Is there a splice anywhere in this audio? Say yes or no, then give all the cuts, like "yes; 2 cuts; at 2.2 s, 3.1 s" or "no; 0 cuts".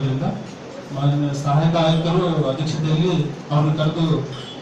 no; 0 cuts